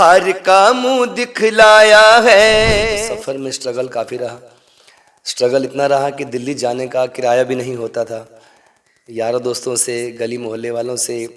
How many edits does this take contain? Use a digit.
1